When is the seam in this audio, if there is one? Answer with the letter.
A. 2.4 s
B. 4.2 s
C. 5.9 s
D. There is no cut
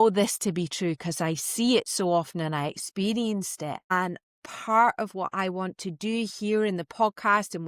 B